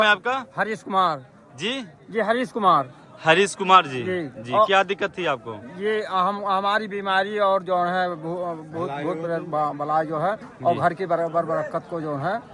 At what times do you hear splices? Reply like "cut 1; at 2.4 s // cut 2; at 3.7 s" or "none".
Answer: none